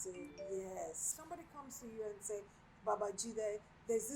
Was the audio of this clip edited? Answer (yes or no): yes